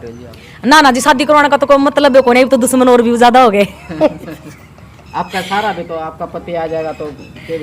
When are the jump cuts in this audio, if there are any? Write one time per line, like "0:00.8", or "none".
none